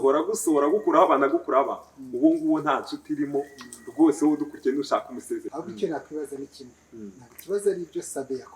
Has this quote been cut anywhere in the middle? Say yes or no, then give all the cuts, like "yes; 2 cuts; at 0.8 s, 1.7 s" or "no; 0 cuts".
yes; 1 cut; at 5.5 s